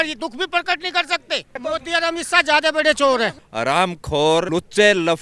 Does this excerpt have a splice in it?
yes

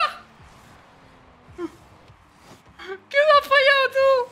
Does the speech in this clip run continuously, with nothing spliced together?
yes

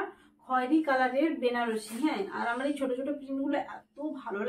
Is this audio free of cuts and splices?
yes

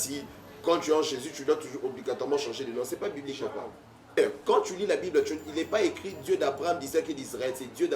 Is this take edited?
yes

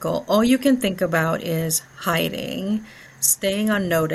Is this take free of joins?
yes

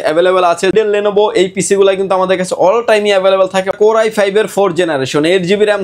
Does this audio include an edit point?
yes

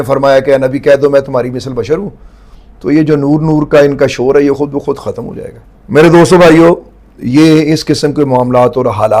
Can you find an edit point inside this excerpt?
no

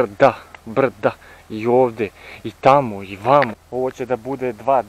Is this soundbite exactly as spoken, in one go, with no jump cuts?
no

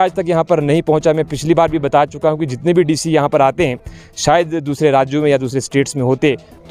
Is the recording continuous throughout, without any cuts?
yes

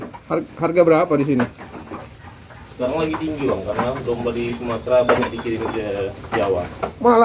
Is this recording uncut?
yes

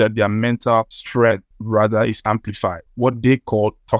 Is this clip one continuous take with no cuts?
no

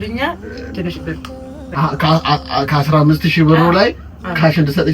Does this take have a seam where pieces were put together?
yes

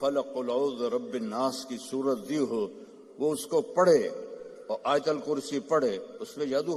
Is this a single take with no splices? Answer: yes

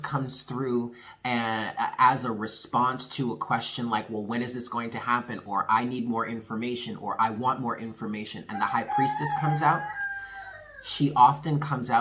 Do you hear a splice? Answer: no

